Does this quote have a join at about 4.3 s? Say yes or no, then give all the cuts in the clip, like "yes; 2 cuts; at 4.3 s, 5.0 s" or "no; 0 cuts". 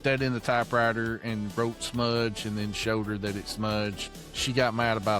no; 0 cuts